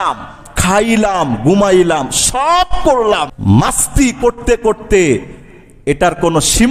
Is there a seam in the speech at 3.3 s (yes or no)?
yes